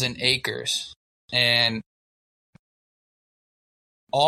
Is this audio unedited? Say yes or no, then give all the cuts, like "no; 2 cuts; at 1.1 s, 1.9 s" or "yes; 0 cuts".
yes; 0 cuts